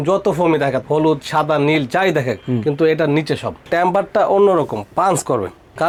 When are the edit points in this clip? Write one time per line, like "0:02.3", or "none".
none